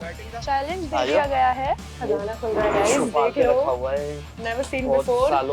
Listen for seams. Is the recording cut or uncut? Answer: cut